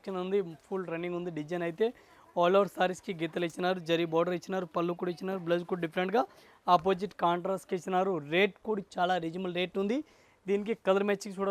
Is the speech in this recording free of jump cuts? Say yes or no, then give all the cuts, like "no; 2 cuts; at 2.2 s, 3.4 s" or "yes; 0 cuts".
yes; 0 cuts